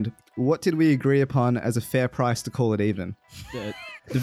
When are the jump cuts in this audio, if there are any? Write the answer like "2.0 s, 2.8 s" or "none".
3.3 s